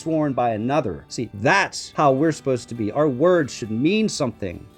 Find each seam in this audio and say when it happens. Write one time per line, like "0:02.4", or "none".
0:01.6